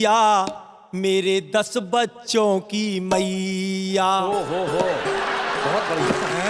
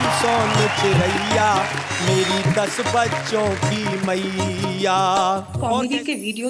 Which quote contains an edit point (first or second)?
second